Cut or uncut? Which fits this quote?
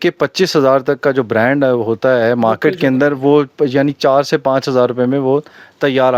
uncut